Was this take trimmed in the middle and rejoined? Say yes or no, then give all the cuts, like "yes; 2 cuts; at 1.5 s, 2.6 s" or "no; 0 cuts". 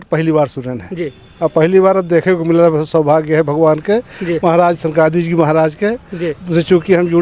no; 0 cuts